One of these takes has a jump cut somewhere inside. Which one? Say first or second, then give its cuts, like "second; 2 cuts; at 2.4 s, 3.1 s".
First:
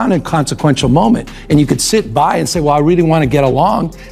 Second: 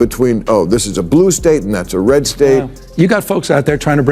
second; 1 cut; at 2.8 s